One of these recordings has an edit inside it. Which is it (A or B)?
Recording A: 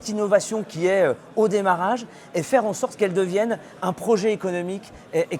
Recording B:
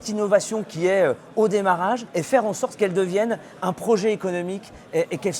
B